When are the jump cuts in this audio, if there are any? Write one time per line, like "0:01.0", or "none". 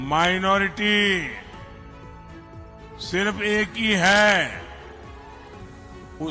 none

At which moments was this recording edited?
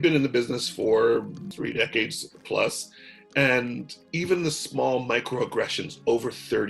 0:01.5

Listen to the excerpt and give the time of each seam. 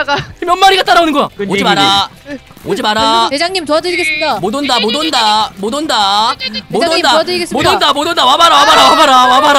0:01.3

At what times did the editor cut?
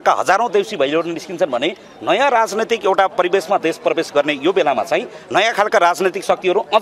none

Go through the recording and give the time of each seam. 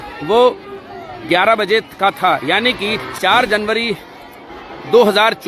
0:03.0

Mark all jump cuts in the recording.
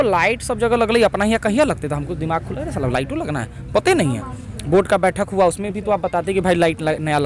none

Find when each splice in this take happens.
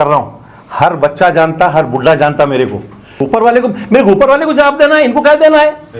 0:03.1

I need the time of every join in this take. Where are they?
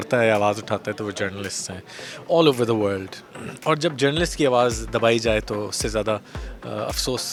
none

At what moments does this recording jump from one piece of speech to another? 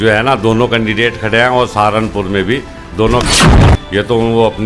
0:03.5

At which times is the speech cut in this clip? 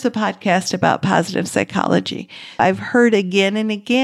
0:02.6

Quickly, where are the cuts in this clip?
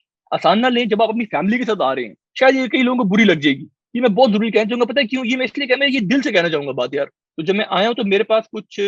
0:02.2
0:07.2

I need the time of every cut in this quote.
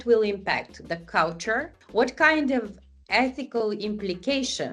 none

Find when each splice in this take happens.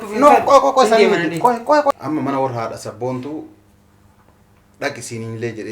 0:01.9

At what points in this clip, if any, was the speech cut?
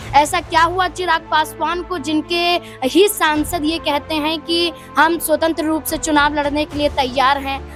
none

